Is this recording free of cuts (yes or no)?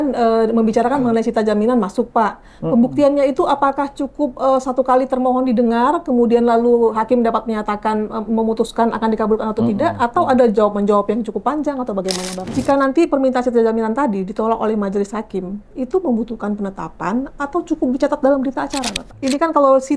no